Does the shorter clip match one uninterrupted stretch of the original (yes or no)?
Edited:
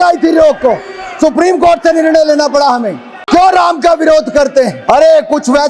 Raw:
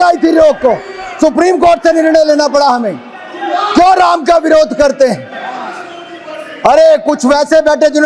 no